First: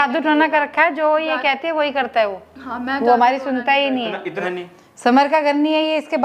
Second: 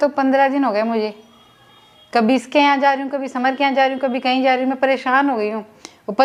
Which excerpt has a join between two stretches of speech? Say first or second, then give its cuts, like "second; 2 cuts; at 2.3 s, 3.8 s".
first; 1 cut; at 4.4 s